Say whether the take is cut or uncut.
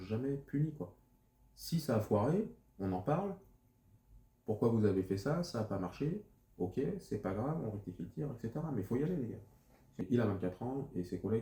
cut